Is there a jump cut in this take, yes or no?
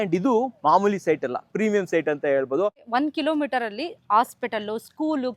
yes